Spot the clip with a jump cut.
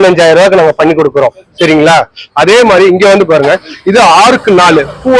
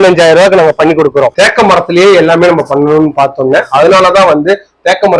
second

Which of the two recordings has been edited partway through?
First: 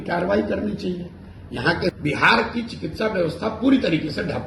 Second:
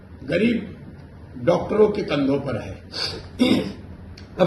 first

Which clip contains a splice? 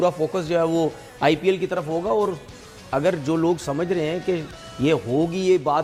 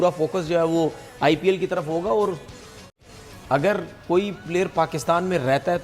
second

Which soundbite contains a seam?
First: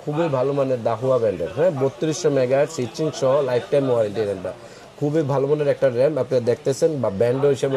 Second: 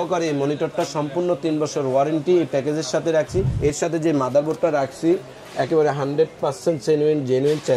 second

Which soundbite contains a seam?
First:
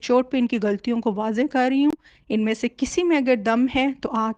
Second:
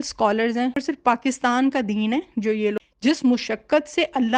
second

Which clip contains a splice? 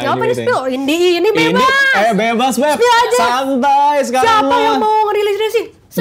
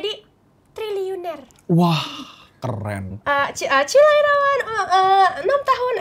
second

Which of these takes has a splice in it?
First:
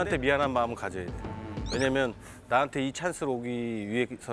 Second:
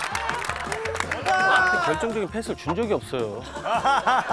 second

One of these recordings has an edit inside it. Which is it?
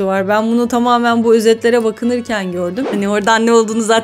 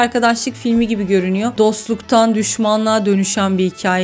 first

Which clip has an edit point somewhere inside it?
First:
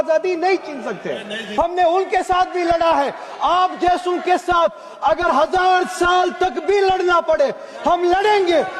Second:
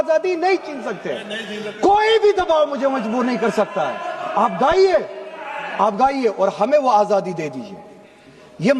first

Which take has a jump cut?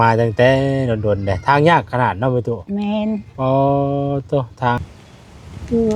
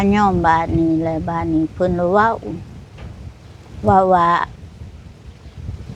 first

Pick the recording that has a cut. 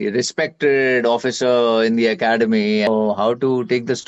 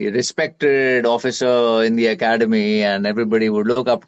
first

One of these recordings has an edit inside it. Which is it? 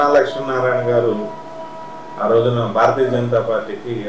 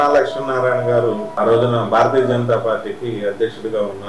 second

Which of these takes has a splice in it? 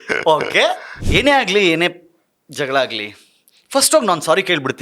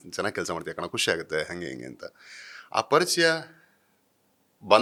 first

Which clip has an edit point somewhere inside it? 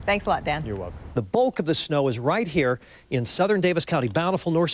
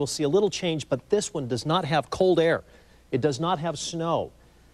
first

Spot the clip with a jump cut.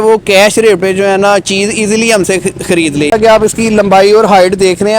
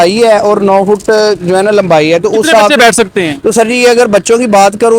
first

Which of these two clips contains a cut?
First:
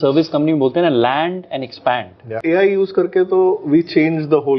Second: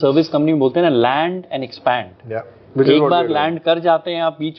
first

